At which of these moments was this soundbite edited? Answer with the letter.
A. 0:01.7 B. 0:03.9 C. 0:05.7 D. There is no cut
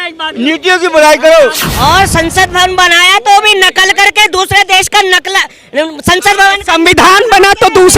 A